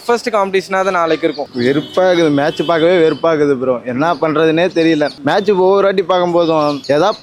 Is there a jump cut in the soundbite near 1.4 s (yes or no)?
yes